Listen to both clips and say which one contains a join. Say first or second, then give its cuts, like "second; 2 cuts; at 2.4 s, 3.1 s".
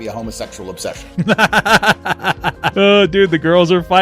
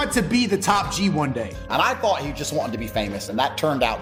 first; 2 cuts; at 1.0 s, 2.7 s